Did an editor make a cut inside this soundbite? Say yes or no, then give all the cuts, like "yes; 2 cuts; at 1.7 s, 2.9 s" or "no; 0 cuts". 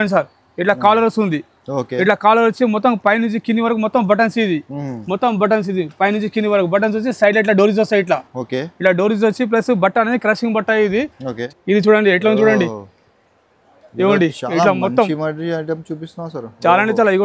yes; 1 cut; at 11.4 s